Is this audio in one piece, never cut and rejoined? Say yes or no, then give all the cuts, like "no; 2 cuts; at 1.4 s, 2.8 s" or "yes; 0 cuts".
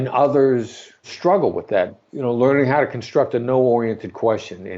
no; 2 cuts; at 1.0 s, 2.0 s